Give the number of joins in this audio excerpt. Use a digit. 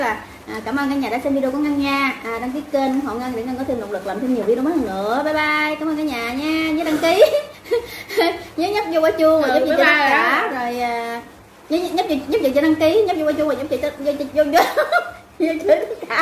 0